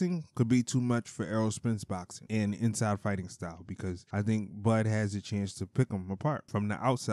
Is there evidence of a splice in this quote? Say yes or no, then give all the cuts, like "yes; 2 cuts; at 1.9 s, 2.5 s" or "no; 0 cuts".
no; 0 cuts